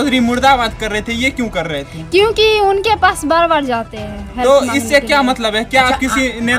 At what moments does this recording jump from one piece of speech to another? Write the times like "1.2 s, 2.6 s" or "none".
none